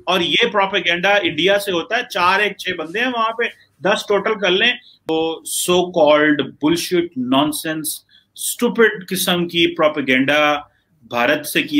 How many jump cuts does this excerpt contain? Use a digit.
1